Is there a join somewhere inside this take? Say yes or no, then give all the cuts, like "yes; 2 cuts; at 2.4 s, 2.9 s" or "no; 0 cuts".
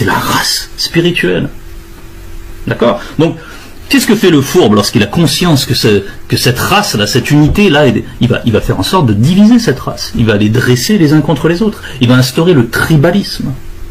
no; 0 cuts